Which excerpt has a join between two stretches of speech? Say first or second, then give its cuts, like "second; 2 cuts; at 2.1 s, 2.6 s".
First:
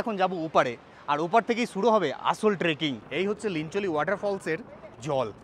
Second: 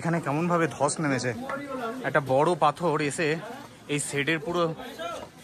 first; 1 cut; at 3.0 s